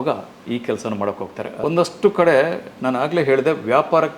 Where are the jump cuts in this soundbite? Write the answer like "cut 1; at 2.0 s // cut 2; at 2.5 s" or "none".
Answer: cut 1; at 1.5 s